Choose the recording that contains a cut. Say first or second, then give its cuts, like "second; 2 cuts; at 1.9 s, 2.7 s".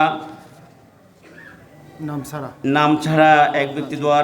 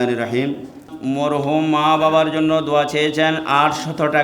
second; 1 cut; at 0.9 s